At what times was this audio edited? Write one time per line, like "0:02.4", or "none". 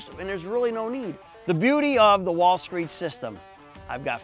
0:01.3